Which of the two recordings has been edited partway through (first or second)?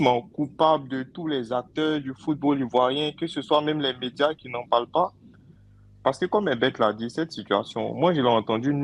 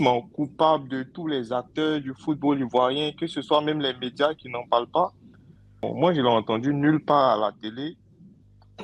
second